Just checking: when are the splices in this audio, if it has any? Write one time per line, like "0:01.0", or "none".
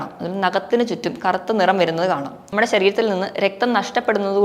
0:02.4

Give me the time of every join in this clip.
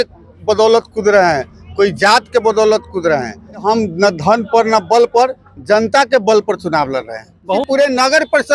0:03.6
0:07.5

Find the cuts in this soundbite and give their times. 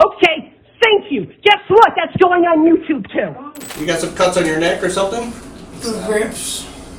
0:03.7

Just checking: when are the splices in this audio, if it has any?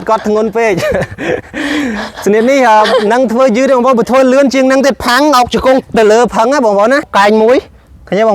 0:07.1

